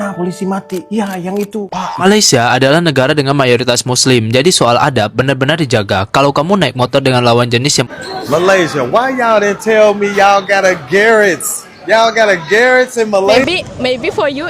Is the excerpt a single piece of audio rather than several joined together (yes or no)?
no